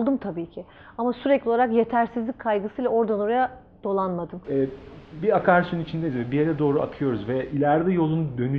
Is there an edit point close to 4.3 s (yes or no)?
yes